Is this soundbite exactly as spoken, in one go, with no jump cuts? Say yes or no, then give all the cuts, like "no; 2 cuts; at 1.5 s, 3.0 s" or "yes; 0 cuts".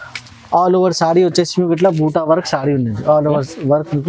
yes; 0 cuts